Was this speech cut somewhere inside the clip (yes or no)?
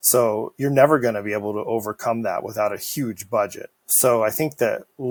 no